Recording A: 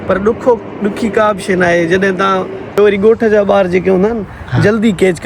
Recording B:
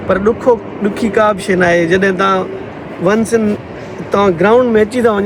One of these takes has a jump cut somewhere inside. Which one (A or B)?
A